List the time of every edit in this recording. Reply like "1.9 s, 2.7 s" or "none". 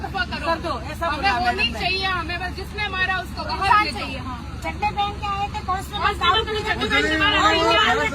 none